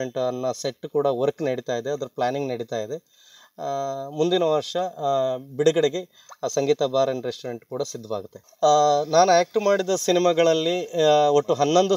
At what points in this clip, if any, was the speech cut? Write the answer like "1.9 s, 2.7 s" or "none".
8.4 s